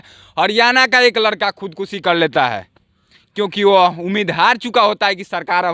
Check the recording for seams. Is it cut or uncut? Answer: uncut